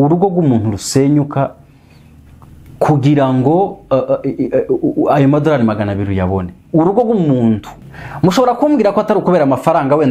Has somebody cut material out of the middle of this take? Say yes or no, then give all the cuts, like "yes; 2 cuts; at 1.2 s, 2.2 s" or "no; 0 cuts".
yes; 1 cut; at 7.7 s